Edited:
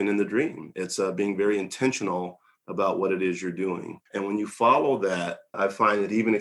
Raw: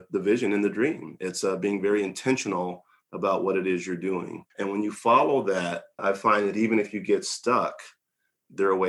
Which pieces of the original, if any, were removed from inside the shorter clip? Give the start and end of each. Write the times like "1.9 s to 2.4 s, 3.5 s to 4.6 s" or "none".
none